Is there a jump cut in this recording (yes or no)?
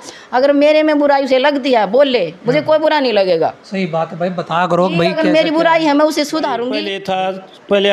yes